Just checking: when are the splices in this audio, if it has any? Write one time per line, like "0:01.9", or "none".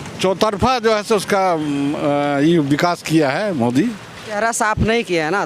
0:04.4

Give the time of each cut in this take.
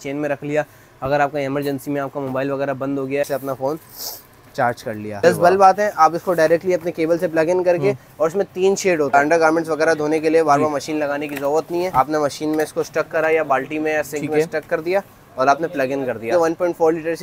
0:03.2
0:05.2
0:09.1
0:11.9
0:16.3

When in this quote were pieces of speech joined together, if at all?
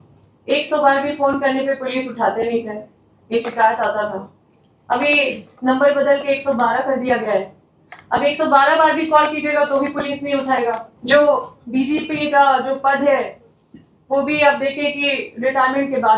0:10.9

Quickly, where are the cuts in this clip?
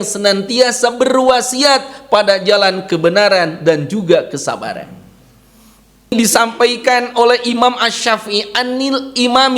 0:06.1

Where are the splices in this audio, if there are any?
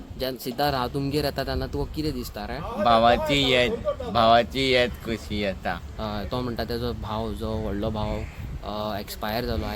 none

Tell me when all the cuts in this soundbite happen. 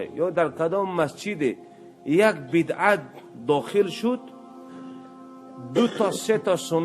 0:04.2
0:05.7

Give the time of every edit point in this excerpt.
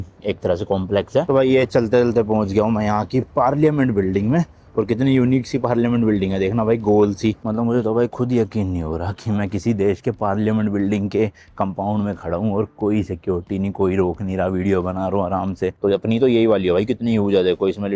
0:01.3
0:07.4
0:15.7

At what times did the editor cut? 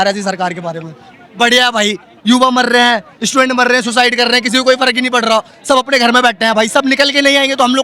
none

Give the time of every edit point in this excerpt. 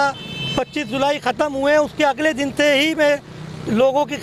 none

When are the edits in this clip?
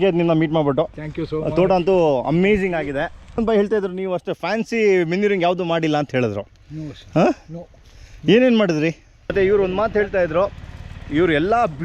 0:03.4
0:09.3

